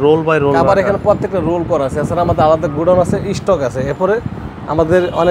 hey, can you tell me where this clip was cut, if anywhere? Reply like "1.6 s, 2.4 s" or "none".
none